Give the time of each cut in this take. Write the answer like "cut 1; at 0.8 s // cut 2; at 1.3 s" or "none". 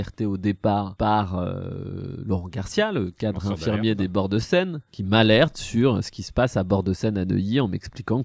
cut 1; at 0.9 s